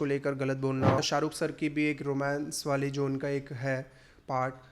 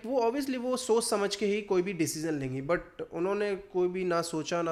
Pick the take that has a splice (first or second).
first